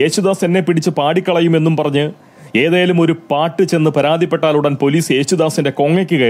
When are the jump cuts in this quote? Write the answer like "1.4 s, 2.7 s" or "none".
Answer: none